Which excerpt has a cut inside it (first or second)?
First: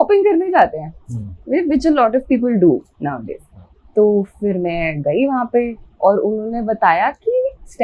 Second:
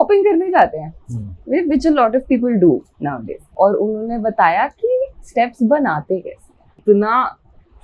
second